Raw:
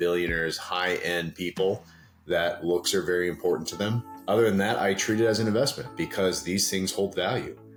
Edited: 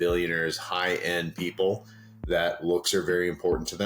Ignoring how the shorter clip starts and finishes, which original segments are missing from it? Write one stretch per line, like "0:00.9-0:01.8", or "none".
none